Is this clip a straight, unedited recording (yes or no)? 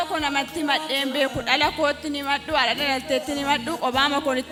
yes